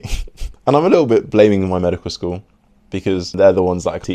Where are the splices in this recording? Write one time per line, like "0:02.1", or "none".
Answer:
none